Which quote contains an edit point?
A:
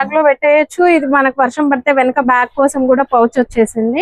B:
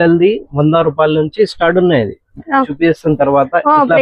B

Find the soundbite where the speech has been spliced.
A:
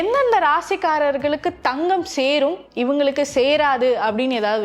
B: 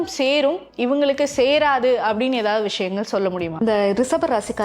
B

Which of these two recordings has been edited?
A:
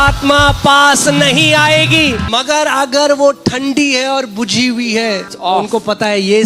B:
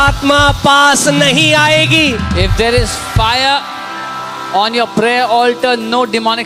A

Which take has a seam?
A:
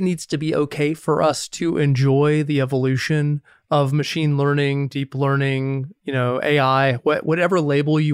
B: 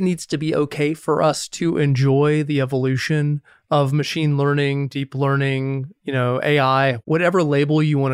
B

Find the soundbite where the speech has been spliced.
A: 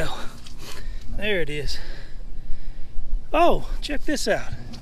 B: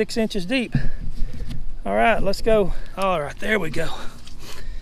B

